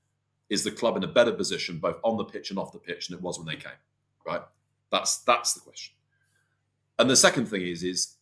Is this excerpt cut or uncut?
uncut